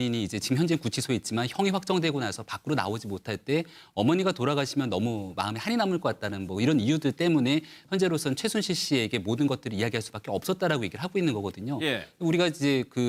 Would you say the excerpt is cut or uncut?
uncut